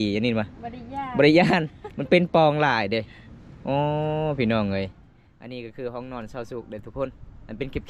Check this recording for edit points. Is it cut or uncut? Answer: uncut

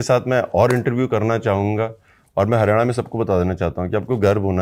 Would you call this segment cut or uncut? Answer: uncut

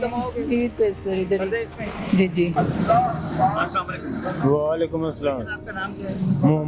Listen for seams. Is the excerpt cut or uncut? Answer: uncut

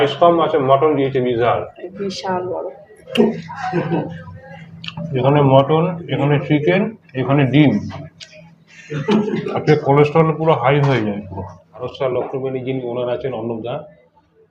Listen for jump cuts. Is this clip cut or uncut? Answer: cut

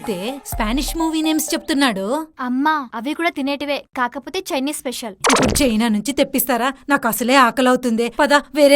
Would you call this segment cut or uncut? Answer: uncut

